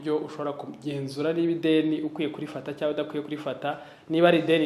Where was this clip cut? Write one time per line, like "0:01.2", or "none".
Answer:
none